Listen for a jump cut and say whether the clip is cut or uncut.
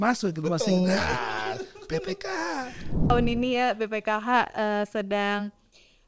cut